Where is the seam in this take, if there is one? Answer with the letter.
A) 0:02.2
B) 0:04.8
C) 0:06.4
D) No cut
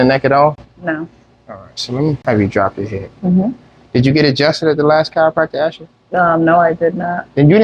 A